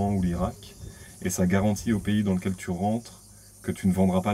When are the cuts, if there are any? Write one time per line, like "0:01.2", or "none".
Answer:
none